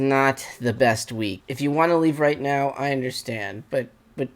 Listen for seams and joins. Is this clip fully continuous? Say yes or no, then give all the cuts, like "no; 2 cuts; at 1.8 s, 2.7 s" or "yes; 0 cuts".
no; 1 cut; at 1.4 s